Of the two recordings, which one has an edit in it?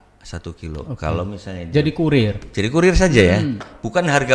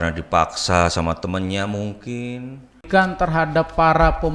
second; 1 cut; at 2.8 s

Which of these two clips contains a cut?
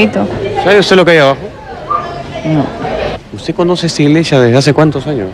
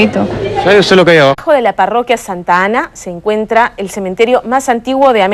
first; 1 cut; at 1.4 s

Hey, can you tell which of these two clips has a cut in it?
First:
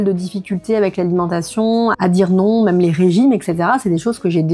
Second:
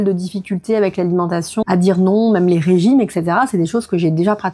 second; 1 cut; at 1.6 s

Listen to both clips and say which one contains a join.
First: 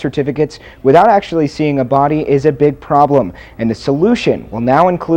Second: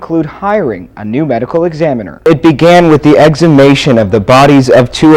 second; 1 cut; at 2.2 s

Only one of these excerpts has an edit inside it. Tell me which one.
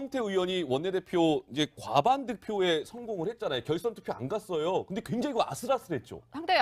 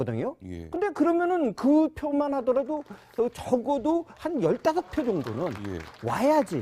second; 1 cut; at 4.9 s

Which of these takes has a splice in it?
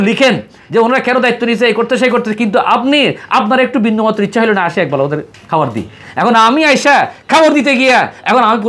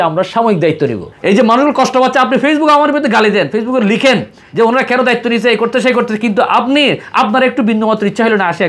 second; 1 cut; at 1.1 s

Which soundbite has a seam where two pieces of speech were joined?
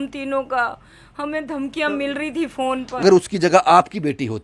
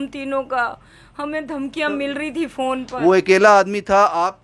first; 1 cut; at 3.0 s

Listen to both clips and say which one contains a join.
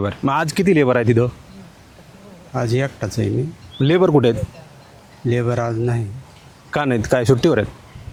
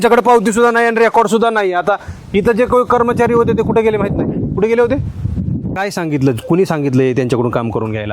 second; 1 cut; at 5.7 s

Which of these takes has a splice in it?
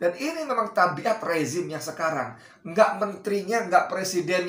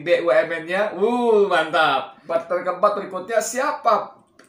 second; 1 cut; at 2.1 s

